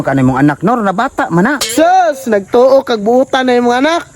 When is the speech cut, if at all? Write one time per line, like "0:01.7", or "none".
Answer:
0:01.7